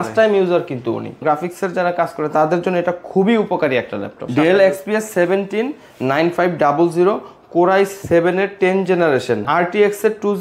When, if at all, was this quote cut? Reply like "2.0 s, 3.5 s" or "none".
1.2 s, 4.2 s, 9.4 s